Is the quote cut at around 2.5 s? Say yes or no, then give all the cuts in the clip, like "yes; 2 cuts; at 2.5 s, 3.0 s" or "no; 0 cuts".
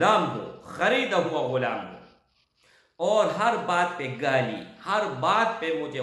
no; 0 cuts